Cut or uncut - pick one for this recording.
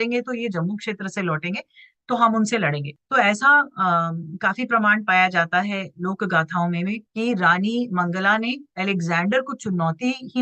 uncut